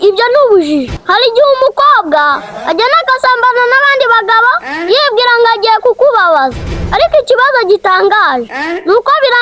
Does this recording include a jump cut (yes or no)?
yes